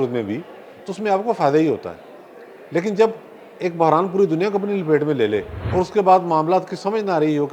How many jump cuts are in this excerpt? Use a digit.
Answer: 1